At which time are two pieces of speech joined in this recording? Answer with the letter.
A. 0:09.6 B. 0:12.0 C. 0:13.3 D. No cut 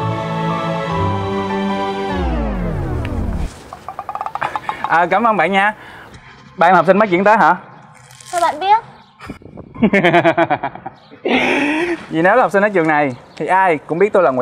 B